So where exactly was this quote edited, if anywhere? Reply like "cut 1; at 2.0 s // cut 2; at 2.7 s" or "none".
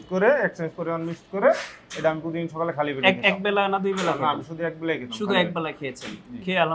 none